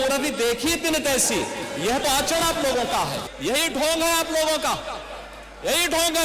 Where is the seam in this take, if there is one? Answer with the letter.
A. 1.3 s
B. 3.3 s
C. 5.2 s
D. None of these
B